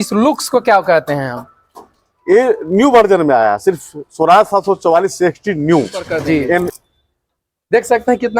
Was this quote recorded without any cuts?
no; 1 cut; at 6.7 s

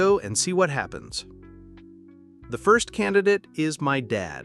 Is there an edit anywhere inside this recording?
yes; 2 cuts; at 1.0 s, 2.5 s

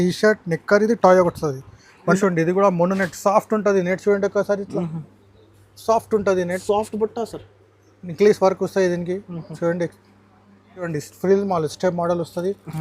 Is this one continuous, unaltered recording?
no; 2 cuts; at 2.2 s, 10.9 s

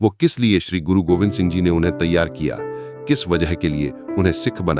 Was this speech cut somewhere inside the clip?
no; 0 cuts

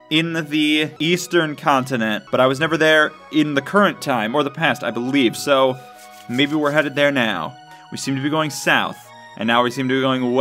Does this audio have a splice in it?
yes; 2 cuts; at 0.9 s, 2.2 s

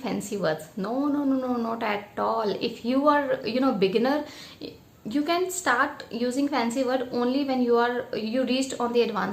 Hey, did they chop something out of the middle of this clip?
no; 0 cuts

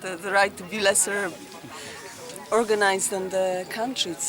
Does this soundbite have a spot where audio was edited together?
no; 0 cuts

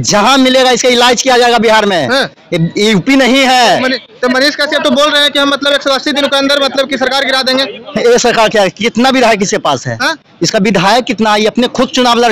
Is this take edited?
no; 0 cuts

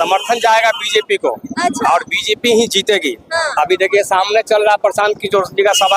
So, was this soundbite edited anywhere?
no; 0 cuts

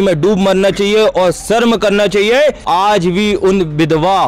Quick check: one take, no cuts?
no; 1 cut; at 2.6 s

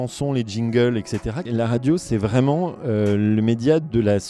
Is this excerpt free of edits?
no; 1 cut; at 1.5 s

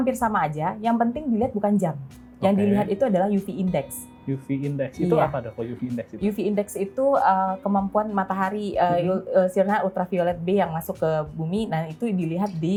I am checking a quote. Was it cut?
no; 0 cuts

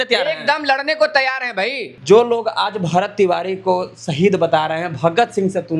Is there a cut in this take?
yes; 1 cut; at 1.9 s

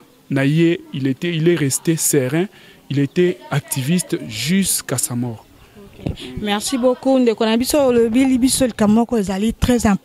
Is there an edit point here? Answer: no; 0 cuts

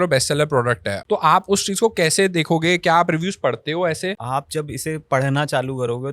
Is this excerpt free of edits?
no; 2 cuts; at 0.9 s, 4.2 s

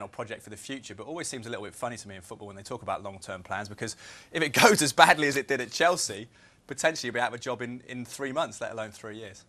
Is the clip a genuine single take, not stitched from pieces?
yes; 0 cuts

